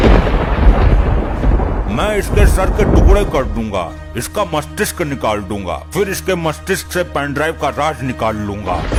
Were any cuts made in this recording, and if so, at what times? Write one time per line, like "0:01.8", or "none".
none